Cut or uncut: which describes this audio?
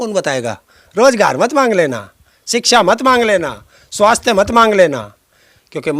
uncut